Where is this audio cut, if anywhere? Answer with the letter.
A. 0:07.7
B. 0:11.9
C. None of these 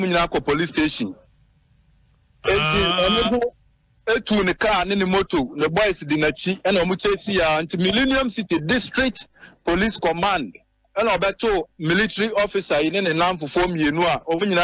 C